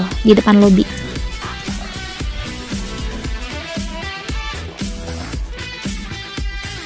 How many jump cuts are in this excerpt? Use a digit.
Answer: 1